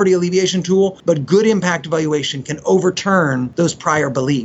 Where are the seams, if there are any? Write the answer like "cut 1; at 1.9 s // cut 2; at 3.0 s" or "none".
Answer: cut 1; at 1.0 s // cut 2; at 3.5 s